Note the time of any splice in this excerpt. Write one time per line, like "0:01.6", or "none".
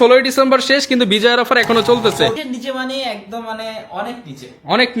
0:02.4